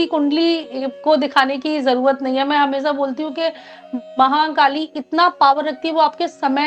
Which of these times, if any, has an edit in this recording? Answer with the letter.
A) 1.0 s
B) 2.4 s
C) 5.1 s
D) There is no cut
D